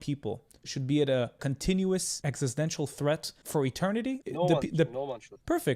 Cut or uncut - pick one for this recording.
cut